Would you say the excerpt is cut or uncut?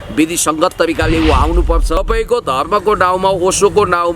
cut